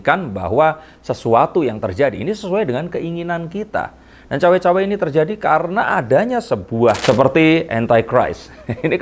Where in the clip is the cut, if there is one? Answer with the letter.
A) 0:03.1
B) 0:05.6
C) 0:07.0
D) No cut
C